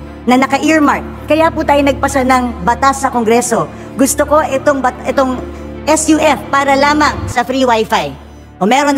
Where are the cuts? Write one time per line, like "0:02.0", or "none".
none